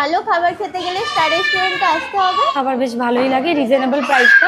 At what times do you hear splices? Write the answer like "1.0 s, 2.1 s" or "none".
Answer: 2.5 s